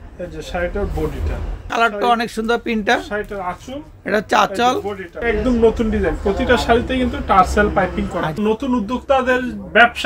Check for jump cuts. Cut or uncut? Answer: cut